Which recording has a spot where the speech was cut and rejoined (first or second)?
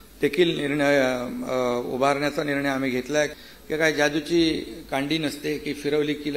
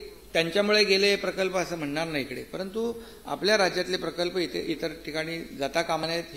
first